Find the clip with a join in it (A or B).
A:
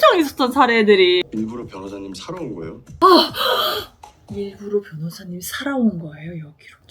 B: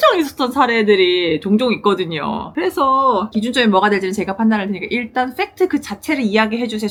A